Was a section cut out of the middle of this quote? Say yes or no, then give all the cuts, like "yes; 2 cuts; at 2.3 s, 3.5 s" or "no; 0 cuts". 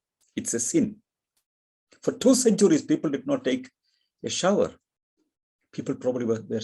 no; 0 cuts